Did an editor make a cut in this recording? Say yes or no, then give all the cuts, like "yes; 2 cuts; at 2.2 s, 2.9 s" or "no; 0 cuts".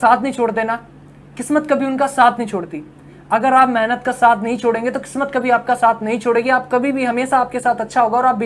no; 0 cuts